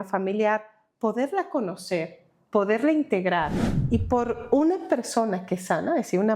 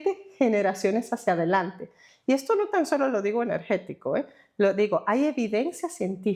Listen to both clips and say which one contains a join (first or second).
first